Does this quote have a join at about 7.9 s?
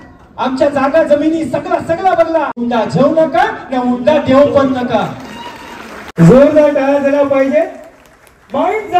no; 2 cuts; at 2.6 s, 6.0 s

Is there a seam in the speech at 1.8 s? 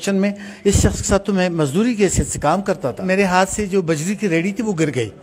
no; 1 cut; at 3.0 s

